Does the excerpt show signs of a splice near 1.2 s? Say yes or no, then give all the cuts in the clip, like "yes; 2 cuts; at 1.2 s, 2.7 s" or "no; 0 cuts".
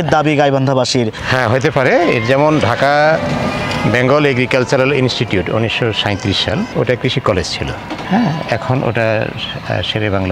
yes; 1 cut; at 1.2 s